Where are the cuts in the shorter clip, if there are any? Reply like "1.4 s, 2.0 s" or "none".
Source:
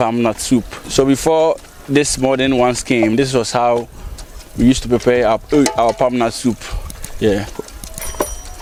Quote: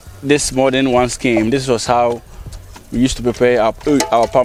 none